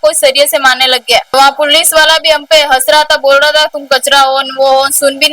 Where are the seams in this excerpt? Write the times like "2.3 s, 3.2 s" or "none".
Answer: 1.3 s